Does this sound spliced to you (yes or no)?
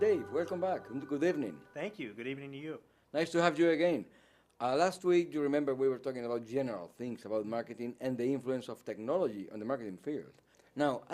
yes